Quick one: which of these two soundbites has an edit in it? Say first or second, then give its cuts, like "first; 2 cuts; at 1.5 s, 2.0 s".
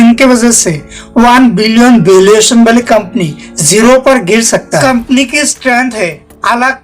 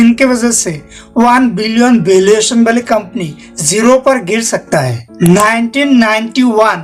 first; 1 cut; at 4.7 s